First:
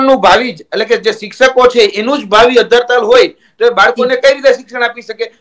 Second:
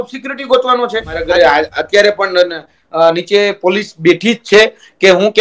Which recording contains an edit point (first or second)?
second